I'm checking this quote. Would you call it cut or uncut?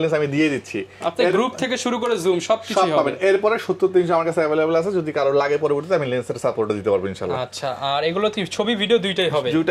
uncut